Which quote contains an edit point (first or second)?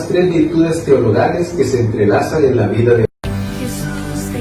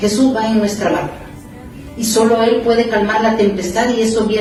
first